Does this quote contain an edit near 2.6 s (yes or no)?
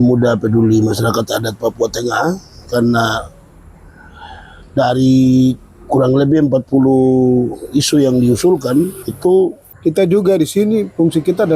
no